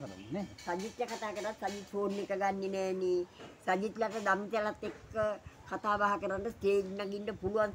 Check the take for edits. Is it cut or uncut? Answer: uncut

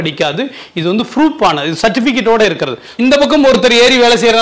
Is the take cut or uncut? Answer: cut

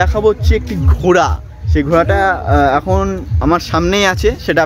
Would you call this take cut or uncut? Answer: uncut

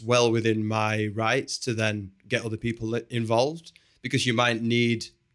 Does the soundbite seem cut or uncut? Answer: uncut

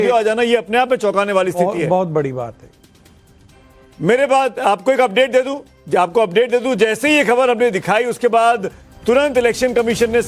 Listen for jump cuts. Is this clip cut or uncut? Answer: uncut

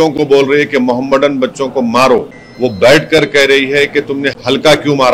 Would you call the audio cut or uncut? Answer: cut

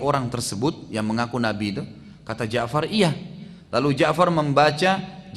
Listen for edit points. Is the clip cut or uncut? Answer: uncut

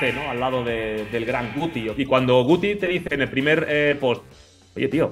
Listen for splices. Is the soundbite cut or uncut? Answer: cut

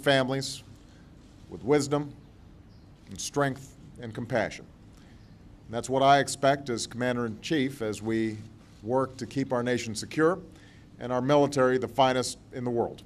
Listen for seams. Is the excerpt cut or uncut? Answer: cut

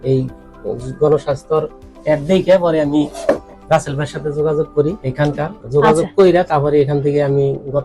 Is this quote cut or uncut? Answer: uncut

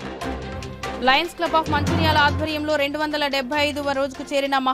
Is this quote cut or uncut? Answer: cut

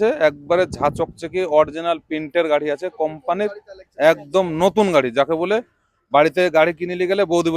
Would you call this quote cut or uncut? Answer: uncut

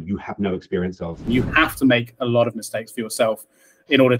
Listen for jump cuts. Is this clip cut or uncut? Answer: cut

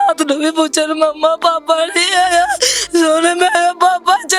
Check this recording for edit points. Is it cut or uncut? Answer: uncut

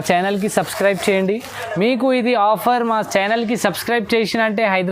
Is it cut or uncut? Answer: cut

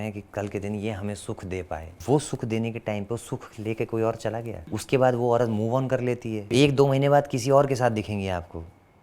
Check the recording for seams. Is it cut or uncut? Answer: cut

